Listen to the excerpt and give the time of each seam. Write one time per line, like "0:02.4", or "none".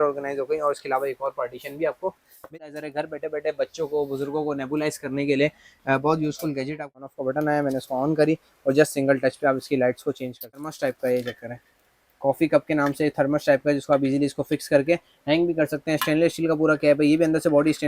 0:02.3
0:06.9
0:10.7